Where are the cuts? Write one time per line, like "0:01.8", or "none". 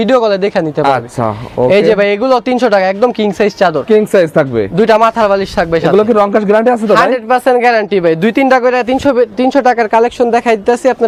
none